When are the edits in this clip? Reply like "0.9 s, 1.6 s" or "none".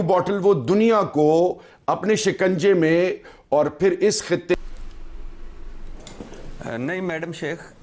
4.5 s